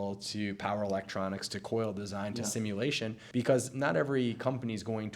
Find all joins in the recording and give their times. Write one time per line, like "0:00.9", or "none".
0:03.2